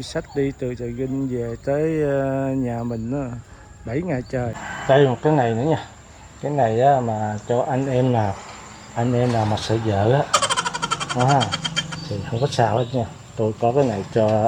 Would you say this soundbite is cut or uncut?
cut